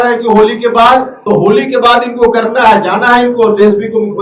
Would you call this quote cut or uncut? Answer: cut